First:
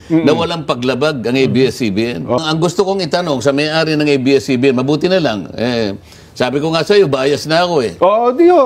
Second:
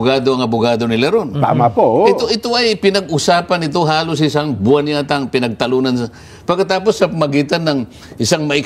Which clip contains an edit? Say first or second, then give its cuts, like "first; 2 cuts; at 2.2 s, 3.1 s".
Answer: first; 1 cut; at 2.4 s